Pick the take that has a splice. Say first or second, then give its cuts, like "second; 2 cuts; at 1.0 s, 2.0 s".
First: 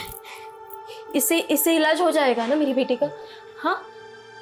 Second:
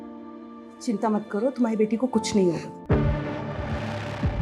second; 1 cut; at 2.7 s